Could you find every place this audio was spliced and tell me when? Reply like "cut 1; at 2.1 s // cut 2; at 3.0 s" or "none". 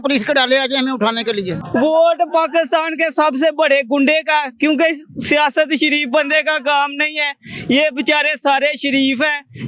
cut 1; at 1.6 s